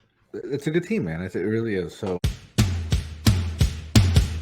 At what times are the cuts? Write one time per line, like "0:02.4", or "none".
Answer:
0:02.2